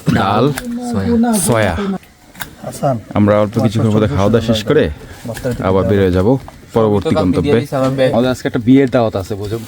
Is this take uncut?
no; 2 cuts; at 2.0 s, 8.1 s

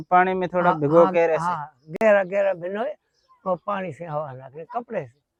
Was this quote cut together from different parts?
no; 0 cuts

